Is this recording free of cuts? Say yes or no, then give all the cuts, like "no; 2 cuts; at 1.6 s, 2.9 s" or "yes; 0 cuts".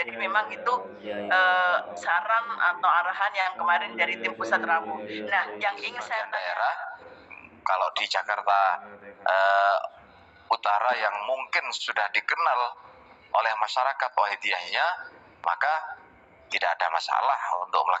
no; 1 cut; at 6.2 s